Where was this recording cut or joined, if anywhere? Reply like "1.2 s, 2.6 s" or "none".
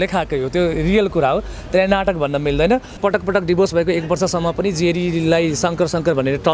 3.0 s